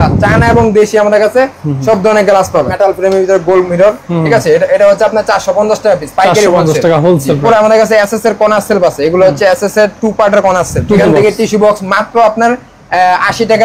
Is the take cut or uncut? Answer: cut